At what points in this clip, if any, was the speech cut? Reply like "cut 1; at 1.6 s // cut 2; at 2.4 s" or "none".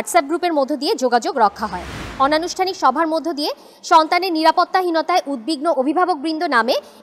cut 1; at 2.0 s